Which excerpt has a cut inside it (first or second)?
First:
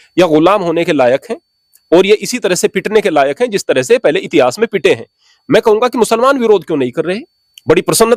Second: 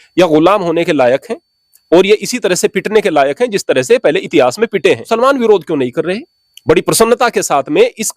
second